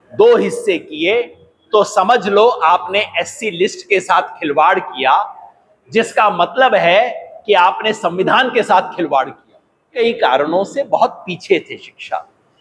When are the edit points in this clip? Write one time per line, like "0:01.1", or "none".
0:09.9